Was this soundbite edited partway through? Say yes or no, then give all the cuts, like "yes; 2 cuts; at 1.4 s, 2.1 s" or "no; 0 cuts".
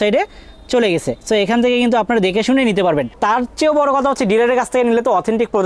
no; 0 cuts